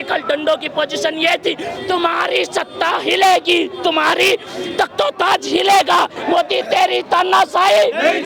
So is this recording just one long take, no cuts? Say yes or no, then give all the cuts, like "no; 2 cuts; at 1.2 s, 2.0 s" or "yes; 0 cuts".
no; 1 cut; at 6.2 s